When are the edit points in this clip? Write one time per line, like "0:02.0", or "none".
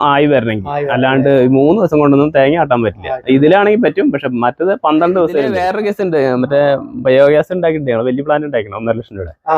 0:05.6